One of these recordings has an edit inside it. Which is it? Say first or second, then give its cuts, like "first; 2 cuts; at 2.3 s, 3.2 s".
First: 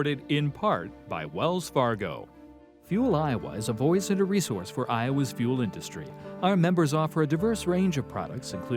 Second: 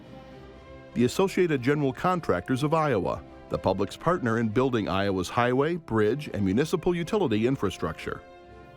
second; 1 cut; at 0.9 s